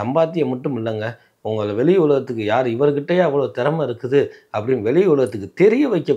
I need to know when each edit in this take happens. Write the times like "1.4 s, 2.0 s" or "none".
none